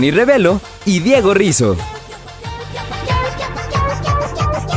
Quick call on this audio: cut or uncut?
cut